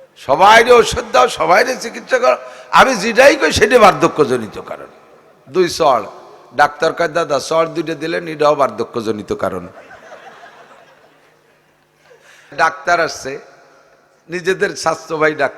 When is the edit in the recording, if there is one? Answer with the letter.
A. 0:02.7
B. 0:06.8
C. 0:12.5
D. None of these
C